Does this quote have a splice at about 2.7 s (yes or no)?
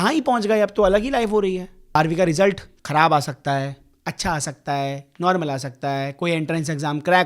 yes